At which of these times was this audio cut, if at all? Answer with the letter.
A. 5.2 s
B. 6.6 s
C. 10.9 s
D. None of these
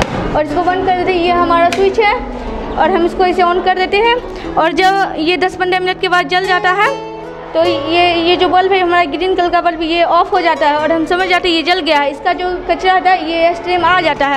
D